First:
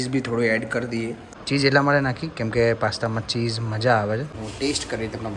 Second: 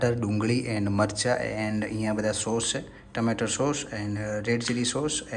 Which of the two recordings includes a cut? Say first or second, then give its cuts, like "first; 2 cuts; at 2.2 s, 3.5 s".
first; 2 cuts; at 1.3 s, 4.3 s